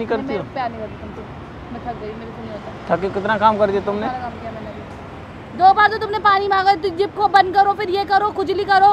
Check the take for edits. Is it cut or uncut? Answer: uncut